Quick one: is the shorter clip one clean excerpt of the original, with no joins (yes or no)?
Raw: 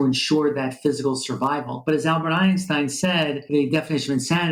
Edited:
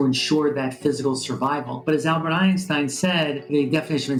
yes